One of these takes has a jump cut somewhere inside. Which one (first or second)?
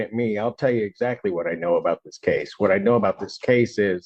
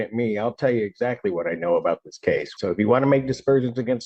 second